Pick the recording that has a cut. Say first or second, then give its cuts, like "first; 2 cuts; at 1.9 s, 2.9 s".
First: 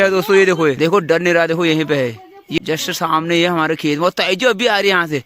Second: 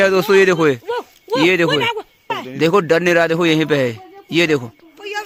first; 2 cuts; at 0.8 s, 2.6 s